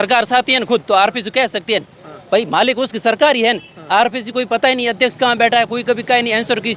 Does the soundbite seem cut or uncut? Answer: uncut